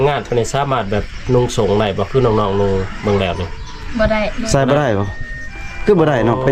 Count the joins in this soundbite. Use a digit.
0